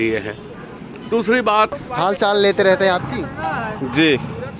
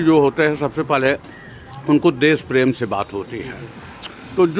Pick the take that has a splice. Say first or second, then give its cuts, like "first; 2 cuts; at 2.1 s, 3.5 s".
first; 1 cut; at 1.8 s